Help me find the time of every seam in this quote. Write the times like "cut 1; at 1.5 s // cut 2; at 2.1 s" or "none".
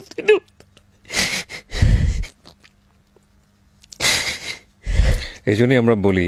none